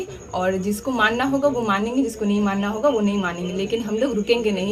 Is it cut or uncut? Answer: uncut